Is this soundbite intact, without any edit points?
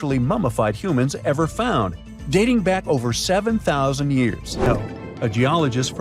no; 1 cut; at 4.7 s

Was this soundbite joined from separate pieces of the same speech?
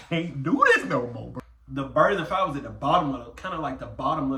no; 0 cuts

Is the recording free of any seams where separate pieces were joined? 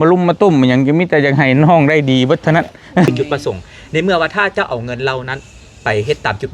no; 1 cut; at 3.1 s

